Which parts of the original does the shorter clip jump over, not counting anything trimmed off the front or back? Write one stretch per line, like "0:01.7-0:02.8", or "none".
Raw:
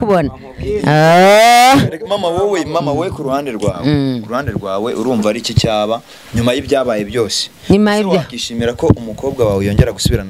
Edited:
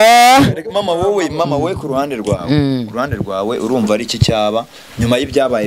none